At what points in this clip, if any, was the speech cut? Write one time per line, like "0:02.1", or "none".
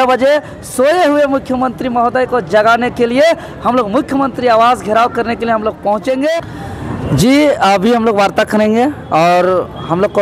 0:06.5